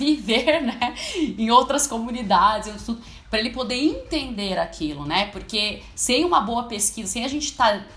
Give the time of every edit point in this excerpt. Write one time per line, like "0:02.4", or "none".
none